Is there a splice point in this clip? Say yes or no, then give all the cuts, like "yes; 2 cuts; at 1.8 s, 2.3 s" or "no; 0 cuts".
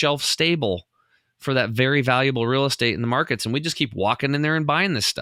no; 0 cuts